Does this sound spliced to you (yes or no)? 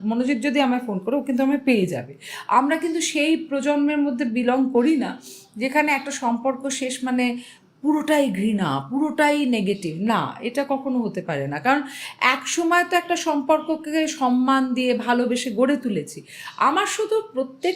no